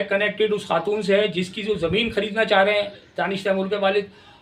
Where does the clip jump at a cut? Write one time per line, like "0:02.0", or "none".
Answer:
none